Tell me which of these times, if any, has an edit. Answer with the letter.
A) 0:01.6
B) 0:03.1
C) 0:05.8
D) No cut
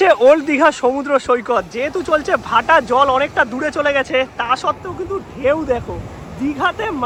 D